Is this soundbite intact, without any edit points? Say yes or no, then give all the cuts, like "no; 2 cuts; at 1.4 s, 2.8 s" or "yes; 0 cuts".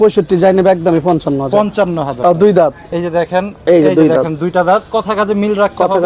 no; 1 cut; at 2.8 s